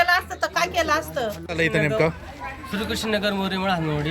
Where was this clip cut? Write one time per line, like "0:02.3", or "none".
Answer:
0:01.5